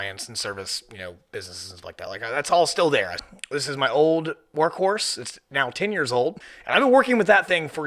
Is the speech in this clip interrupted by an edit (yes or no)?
yes